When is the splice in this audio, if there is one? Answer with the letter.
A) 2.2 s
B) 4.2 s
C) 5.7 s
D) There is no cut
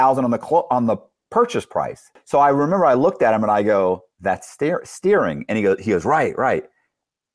A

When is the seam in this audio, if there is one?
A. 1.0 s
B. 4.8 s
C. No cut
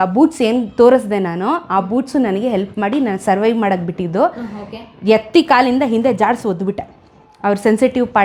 C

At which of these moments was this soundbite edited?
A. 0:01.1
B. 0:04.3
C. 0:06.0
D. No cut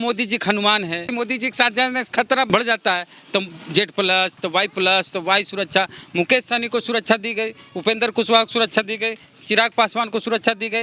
A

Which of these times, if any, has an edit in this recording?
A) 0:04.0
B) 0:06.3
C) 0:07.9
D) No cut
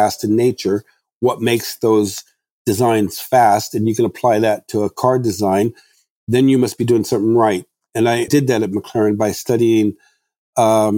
C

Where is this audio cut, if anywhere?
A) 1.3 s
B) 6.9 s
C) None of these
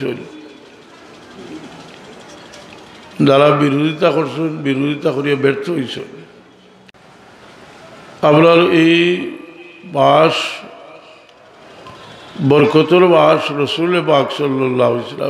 B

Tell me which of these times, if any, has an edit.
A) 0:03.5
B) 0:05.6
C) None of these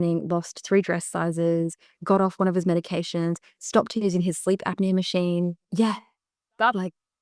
B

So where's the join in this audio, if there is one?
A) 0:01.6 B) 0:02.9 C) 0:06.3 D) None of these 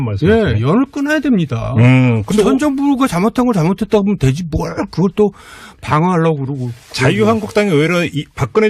C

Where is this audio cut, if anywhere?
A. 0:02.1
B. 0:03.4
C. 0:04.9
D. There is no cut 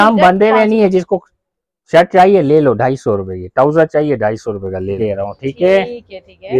C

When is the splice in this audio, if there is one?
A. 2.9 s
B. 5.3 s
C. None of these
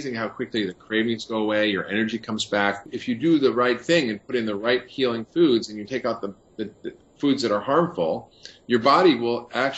A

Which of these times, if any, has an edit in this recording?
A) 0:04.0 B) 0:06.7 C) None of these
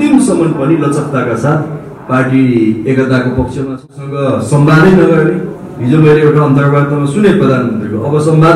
A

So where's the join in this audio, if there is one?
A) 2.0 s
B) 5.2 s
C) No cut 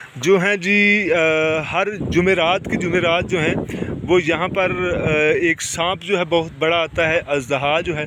C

